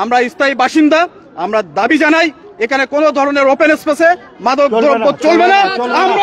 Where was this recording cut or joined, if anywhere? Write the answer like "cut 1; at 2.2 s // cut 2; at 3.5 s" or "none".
none